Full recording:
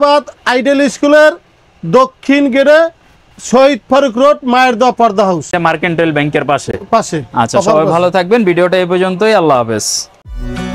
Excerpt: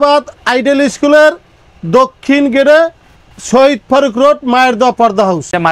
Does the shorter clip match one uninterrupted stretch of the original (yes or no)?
yes